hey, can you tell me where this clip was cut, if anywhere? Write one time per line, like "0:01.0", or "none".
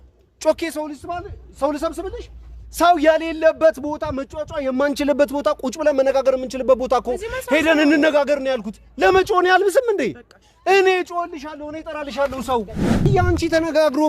0:13.0